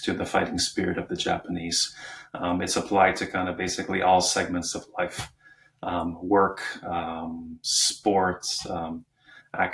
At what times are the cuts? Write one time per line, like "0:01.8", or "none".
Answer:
none